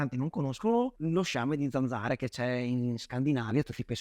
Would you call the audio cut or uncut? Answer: uncut